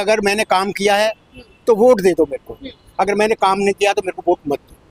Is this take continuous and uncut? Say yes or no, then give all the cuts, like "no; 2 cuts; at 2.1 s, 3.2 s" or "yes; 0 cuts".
yes; 0 cuts